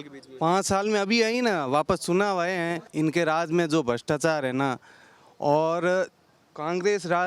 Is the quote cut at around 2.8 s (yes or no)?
yes